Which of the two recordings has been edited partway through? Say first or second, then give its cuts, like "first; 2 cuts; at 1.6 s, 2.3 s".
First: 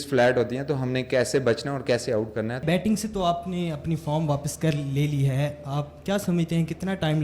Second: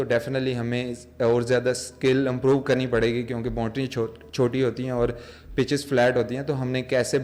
first; 1 cut; at 2.6 s